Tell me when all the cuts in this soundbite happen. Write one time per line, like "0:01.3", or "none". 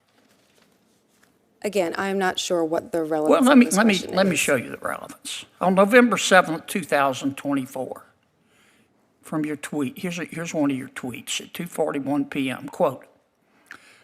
none